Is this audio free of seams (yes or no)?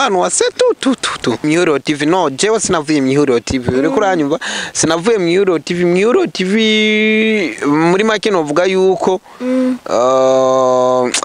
no